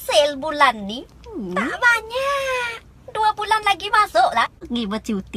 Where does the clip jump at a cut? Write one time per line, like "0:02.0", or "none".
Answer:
0:03.8

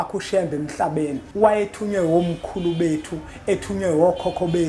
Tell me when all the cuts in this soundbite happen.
0:01.2

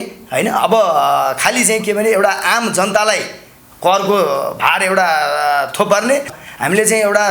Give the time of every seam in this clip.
0:06.4

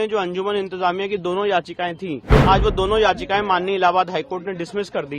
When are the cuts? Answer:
0:02.4

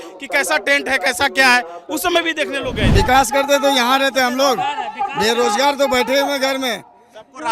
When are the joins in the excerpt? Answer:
0:02.9

